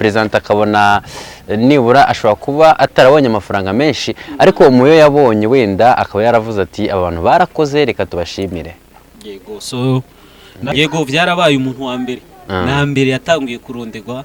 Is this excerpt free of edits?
no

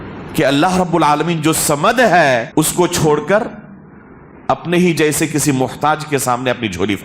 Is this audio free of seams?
no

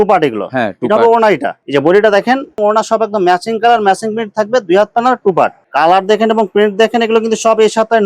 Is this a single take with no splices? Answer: no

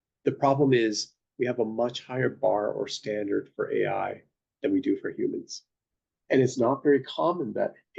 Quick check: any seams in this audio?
no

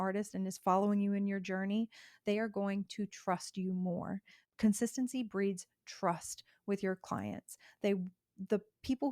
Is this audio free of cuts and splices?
no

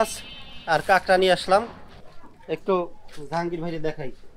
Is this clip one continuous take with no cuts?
yes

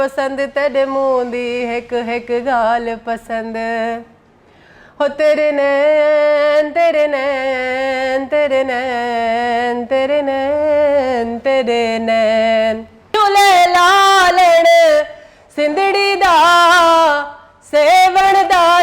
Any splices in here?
yes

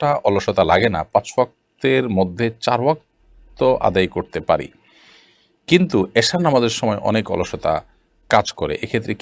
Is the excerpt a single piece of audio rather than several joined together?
yes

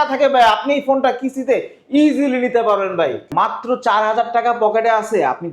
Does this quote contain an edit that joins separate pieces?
yes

